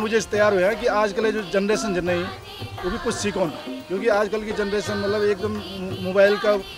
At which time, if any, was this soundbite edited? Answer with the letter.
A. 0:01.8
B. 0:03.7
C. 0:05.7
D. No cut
B